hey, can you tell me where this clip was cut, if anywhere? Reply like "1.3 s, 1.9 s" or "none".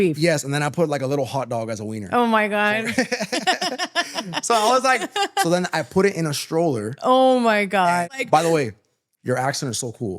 8.2 s